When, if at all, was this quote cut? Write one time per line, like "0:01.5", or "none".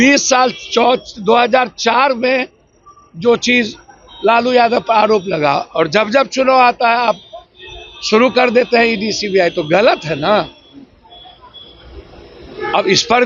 none